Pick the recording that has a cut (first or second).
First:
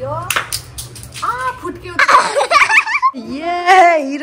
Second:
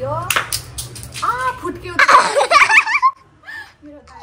first